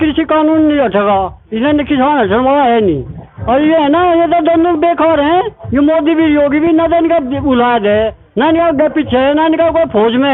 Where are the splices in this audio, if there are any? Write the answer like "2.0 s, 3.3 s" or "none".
none

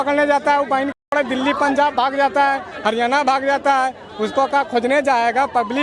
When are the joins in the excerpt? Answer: none

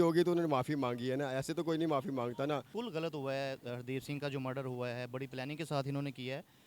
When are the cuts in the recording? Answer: 2.7 s

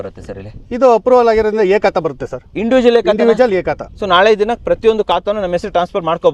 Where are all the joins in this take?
none

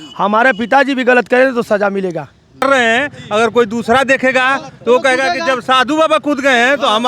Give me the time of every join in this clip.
2.6 s

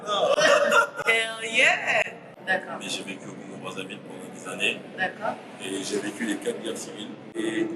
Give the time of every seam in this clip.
2.2 s

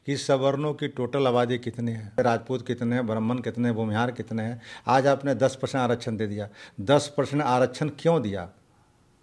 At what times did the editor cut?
2.2 s

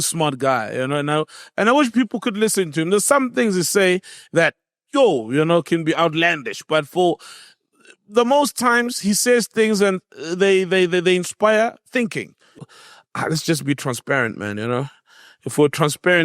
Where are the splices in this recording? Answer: 12.6 s

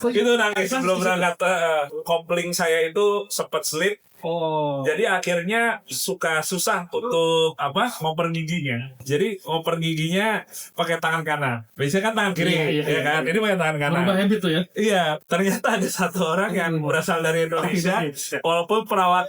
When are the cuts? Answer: 1.9 s, 9.0 s, 15.2 s

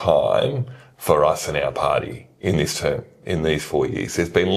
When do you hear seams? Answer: none

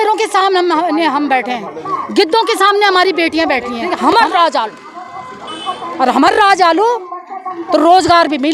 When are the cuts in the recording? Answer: 3.8 s

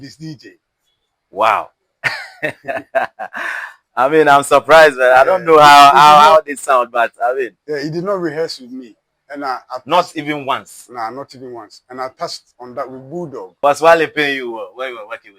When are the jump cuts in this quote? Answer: 13.5 s

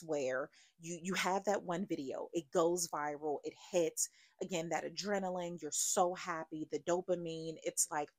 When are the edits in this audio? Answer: none

